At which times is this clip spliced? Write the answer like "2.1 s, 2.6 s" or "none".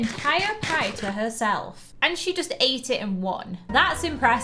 none